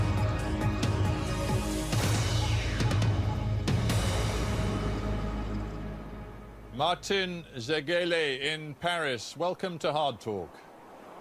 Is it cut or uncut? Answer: cut